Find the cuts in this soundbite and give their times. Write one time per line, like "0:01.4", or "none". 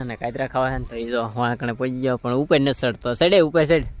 none